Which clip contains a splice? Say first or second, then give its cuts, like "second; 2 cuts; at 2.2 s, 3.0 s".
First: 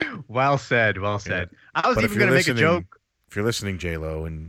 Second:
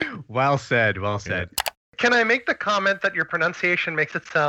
second; 1 cut; at 1.8 s